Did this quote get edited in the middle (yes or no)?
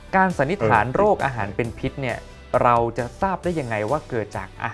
no